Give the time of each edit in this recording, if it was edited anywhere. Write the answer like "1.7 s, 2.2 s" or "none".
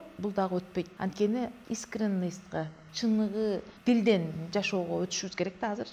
0.9 s, 1.6 s, 3.7 s